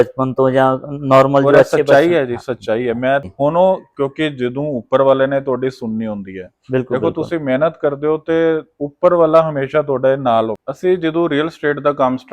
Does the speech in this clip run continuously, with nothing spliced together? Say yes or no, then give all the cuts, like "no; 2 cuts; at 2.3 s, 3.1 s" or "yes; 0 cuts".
no; 2 cuts; at 3.3 s, 10.5 s